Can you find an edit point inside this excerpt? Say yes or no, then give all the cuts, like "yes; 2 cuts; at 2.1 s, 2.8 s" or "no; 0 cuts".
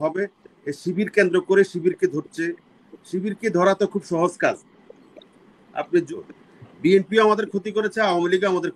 yes; 1 cut; at 6.1 s